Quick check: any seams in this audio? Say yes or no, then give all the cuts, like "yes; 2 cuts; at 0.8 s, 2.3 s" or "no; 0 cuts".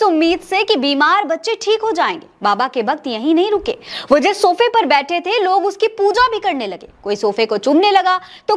no; 0 cuts